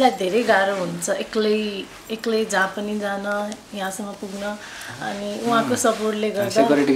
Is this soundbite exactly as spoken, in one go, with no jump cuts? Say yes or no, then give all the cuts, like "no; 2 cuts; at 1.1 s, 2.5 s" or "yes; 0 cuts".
yes; 0 cuts